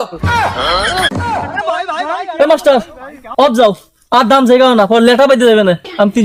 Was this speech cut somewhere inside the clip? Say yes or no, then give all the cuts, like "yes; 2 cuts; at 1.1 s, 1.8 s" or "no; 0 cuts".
no; 0 cuts